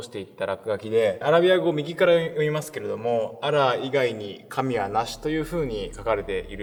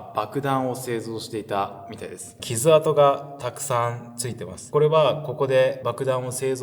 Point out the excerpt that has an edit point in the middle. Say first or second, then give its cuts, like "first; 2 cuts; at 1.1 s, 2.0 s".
second; 3 cuts; at 2.3 s, 4.7 s, 5.8 s